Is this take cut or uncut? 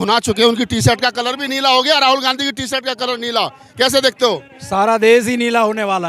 uncut